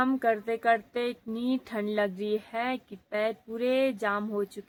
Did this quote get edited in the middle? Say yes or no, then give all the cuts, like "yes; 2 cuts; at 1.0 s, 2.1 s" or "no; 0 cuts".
no; 0 cuts